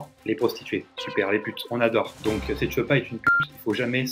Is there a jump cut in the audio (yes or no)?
no